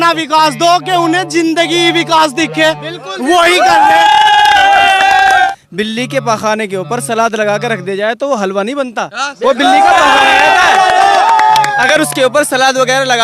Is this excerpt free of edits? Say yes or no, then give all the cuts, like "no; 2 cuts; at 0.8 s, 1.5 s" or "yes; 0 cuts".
no; 1 cut; at 5.5 s